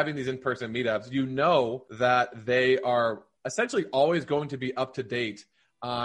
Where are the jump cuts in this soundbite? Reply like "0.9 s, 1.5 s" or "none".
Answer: 1.8 s